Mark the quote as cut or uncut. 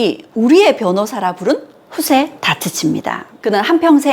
cut